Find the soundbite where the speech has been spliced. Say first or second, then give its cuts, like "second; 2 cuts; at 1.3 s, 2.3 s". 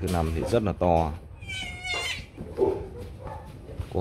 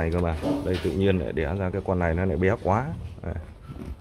first; 1 cut; at 2.4 s